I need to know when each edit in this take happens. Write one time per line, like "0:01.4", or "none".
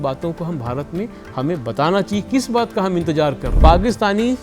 0:03.5